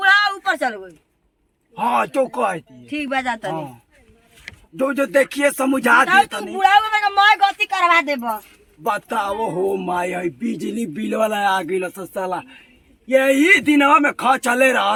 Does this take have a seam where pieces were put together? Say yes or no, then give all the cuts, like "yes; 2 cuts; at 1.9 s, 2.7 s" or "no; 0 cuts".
no; 0 cuts